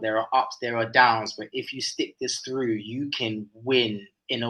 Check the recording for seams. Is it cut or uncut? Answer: uncut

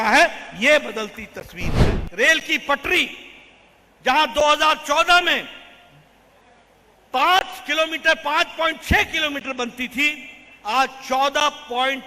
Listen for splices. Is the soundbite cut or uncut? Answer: cut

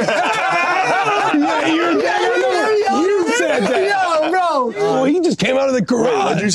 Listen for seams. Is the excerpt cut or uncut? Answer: cut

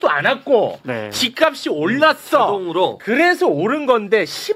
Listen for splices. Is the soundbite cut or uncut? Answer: uncut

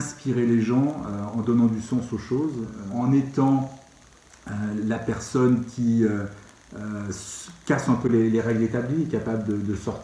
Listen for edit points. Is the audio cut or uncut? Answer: cut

